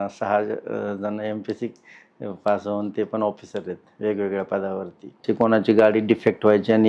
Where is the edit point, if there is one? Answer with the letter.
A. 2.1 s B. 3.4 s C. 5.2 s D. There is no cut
C